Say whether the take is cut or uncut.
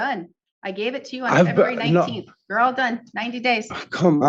uncut